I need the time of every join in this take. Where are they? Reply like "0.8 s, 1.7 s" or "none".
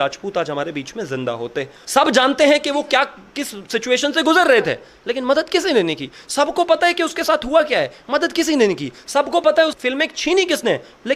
1.8 s